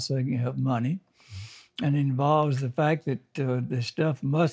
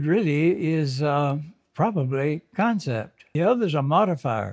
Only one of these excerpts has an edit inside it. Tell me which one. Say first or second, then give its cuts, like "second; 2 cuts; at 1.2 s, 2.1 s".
second; 1 cut; at 3.3 s